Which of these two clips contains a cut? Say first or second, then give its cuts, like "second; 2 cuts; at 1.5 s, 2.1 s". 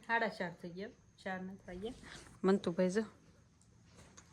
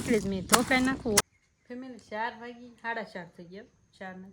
second; 1 cut; at 1.2 s